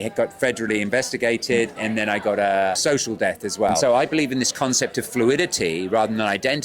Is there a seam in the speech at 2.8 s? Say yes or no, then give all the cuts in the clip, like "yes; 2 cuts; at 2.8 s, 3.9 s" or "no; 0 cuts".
yes; 3 cuts; at 1.8 s, 2.8 s, 3.8 s